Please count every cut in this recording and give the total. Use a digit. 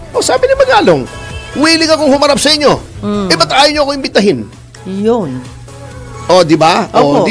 0